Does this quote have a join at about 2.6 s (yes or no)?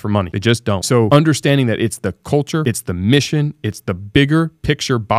yes